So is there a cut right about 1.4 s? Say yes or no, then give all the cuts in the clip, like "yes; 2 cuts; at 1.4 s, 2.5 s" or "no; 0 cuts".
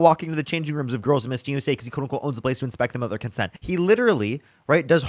no; 1 cut; at 3.5 s